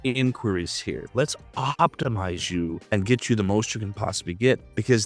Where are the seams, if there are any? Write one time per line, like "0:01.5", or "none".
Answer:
0:01.0